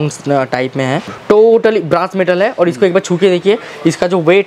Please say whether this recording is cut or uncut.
cut